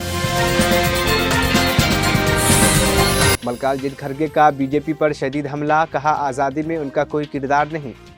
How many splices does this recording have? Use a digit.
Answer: 0